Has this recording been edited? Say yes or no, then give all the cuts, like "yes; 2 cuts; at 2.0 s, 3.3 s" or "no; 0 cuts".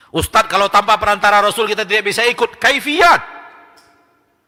no; 0 cuts